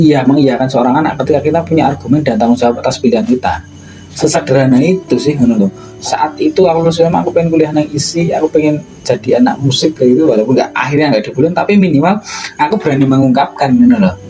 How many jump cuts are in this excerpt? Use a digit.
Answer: 1